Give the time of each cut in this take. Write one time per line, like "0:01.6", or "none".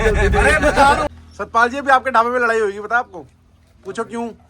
0:01.1